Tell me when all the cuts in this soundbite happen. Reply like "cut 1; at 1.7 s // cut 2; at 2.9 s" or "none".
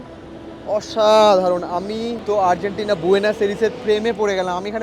cut 1; at 2.1 s